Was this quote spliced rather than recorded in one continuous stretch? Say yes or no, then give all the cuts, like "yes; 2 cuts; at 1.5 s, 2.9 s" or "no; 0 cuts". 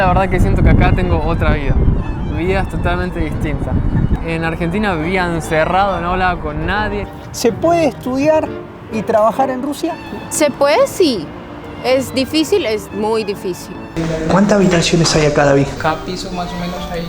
yes; 4 cuts; at 4.1 s, 7.2 s, 13.8 s, 15.7 s